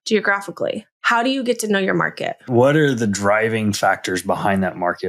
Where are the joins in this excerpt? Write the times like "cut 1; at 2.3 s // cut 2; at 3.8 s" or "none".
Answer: cut 1; at 0.9 s // cut 2; at 2.4 s